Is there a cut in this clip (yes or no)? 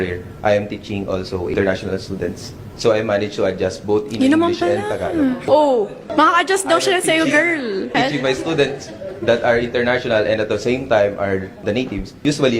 yes